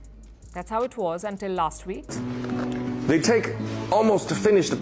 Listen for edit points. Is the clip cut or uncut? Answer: cut